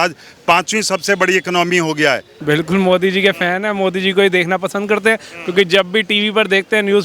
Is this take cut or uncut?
cut